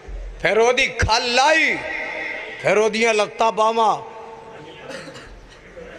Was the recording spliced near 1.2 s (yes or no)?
yes